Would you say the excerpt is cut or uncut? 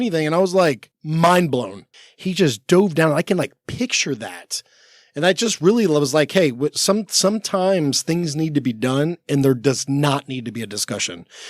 cut